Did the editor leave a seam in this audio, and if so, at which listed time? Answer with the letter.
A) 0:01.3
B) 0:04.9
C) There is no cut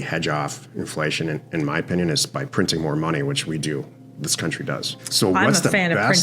B